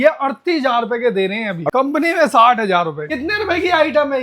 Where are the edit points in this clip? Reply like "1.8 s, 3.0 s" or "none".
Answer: 1.7 s, 3.0 s